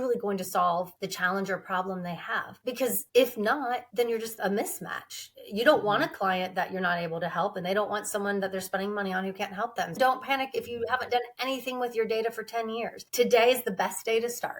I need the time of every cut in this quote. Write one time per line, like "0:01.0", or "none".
0:04.4
0:10.0